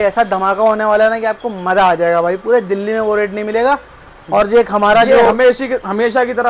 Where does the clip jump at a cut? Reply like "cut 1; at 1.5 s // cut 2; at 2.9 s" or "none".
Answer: none

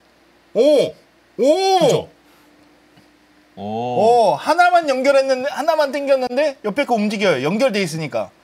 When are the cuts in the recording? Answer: none

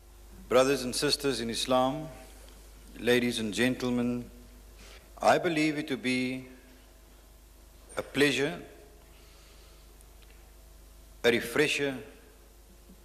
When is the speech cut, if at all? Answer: cut 1; at 2.5 s

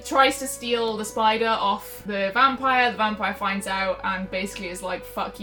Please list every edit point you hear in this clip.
none

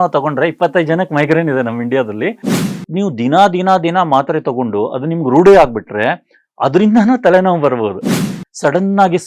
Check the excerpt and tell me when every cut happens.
cut 1; at 2.8 s // cut 2; at 8.2 s

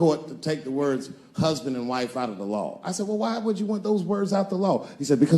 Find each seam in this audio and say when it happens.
none

